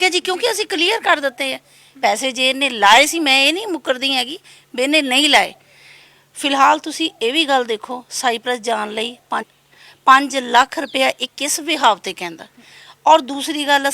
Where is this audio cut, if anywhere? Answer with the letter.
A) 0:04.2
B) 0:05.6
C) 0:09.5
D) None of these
C